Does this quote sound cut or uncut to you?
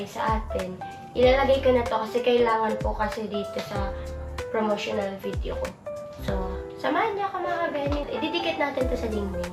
uncut